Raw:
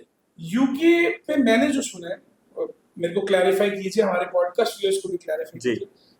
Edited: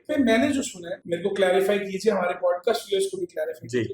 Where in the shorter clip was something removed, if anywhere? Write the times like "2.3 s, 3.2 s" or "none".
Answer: 0.9 s

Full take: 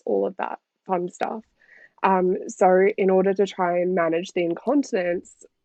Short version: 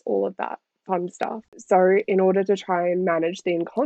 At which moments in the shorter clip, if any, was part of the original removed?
1.6 s

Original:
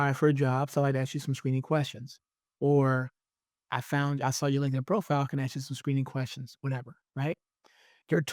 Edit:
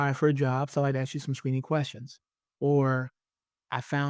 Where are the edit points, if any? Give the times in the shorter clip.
none

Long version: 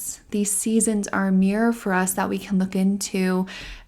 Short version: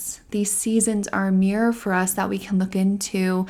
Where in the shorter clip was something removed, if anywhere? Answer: none

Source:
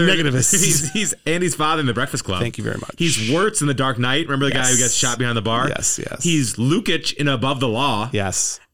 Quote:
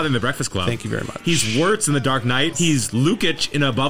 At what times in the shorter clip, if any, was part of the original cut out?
2.5 s

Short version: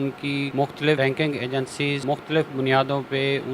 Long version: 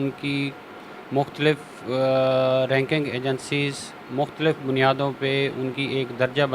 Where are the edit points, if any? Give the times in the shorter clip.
1.0 s, 2.0 s

